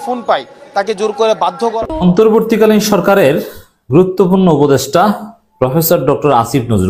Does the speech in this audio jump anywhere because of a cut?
yes; 1 cut; at 1.8 s

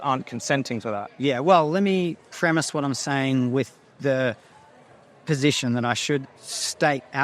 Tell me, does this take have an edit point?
no; 0 cuts

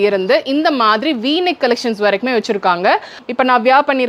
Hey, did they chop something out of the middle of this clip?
yes; 1 cut; at 3.1 s

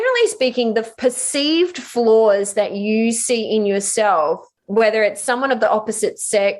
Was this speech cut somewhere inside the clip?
yes; 2 cuts; at 0.9 s, 4.5 s

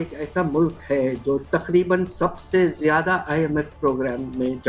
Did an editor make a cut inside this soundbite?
no; 0 cuts

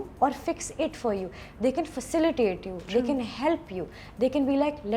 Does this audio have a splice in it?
no; 0 cuts

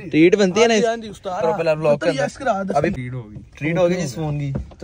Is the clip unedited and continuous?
no; 2 cuts; at 1.4 s, 2.9 s

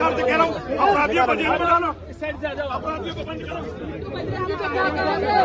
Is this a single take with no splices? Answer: yes; 0 cuts

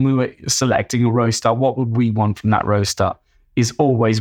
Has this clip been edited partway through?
no; 0 cuts

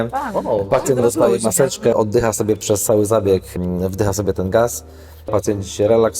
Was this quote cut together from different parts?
yes; 2 cuts; at 1.9 s, 5.3 s

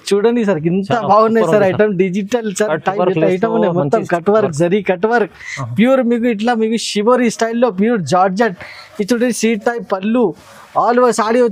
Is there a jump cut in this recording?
no; 0 cuts

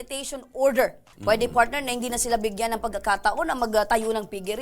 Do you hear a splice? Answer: yes; 1 cut; at 1.1 s

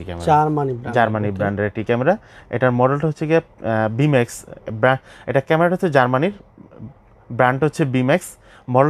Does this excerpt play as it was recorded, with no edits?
yes; 0 cuts

